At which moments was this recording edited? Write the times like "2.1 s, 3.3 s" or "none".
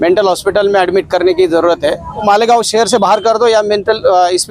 2.2 s